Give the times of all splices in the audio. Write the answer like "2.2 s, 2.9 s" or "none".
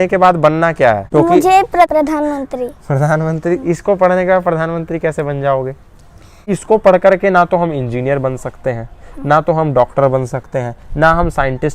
1.0 s, 1.9 s, 6.4 s

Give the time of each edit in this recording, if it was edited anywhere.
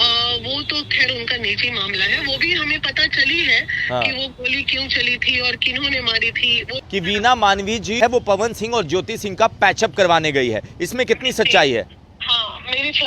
6.8 s, 8.0 s

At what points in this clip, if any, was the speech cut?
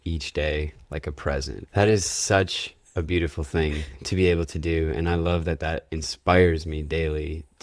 1.6 s

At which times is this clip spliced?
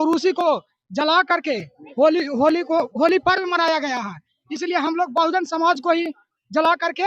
none

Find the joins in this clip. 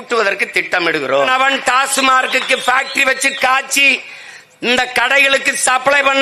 1.3 s

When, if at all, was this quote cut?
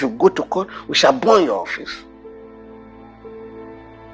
2.2 s

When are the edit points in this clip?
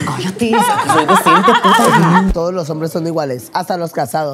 2.3 s

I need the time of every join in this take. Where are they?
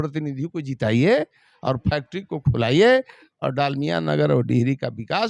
none

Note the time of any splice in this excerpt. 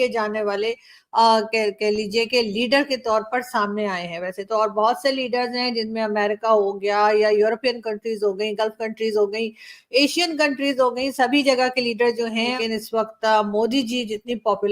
12.6 s

